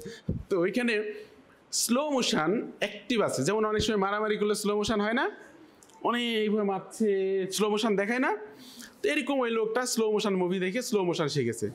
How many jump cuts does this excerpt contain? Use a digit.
0